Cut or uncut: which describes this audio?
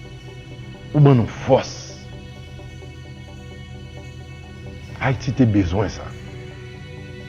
cut